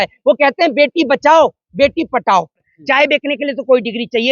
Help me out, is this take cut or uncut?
cut